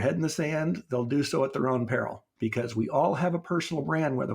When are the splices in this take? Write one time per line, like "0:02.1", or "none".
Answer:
0:02.2